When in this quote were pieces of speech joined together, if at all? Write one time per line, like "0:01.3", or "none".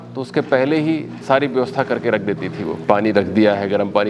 0:02.8

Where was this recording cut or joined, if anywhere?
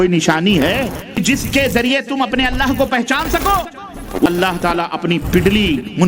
0:01.2
0:04.3

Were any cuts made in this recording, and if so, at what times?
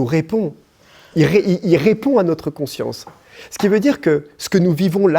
none

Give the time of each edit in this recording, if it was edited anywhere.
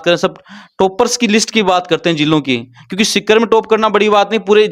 none

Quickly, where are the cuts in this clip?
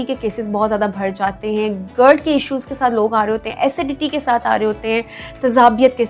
none

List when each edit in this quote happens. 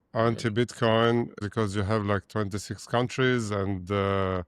0:01.4

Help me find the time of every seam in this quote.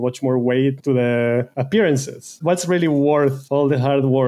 0:00.8
0:01.6
0:02.3
0:03.4

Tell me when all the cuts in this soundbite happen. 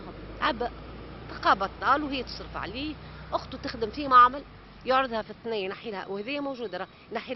none

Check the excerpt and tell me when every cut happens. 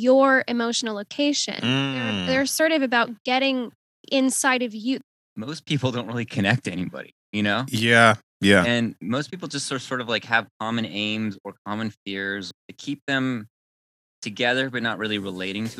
0:05.0
0:12.6

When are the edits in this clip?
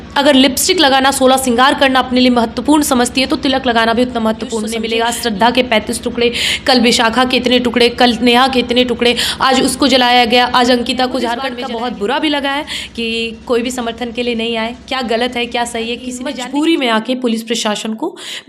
0:04.8
0:11.5
0:16.3

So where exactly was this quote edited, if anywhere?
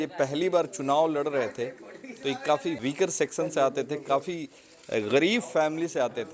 0:03.1

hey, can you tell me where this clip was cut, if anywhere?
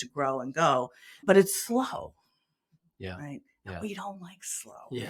none

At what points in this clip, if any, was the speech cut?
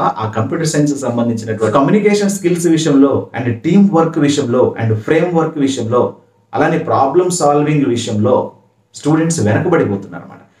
0:01.7

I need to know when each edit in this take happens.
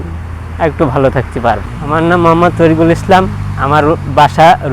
0:01.7

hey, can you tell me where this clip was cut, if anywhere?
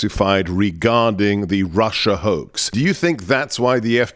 0:02.6

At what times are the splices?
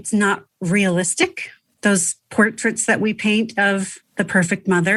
none

